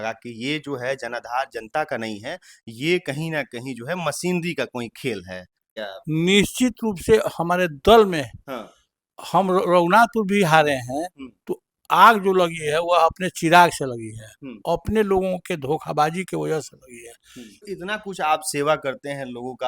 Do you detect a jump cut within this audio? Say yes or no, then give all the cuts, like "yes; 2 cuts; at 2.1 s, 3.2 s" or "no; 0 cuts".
yes; 2 cuts; at 5.8 s, 17.8 s